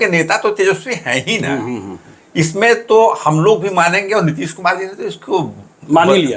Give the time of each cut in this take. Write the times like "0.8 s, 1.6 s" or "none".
none